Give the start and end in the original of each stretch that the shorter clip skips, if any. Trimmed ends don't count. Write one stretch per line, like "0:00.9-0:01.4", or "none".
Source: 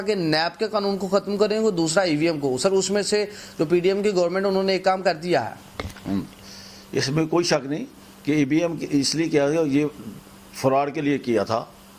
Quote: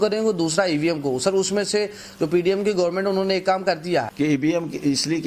0:05.5-0:08.2